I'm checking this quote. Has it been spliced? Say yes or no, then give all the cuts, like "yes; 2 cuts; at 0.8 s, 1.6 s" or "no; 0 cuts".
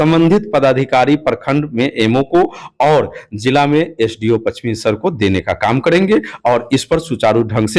no; 0 cuts